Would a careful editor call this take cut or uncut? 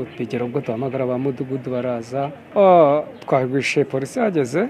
cut